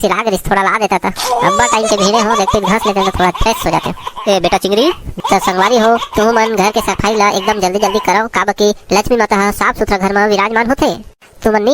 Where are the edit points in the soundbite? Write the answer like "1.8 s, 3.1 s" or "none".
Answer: 5.2 s